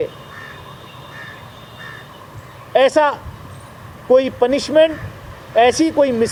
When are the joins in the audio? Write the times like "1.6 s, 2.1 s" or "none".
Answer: none